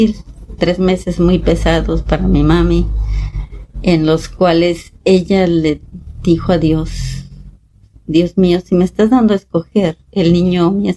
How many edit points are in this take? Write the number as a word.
zero